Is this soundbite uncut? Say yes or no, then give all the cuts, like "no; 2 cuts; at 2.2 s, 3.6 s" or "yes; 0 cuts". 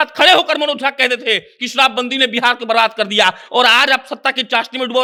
yes; 0 cuts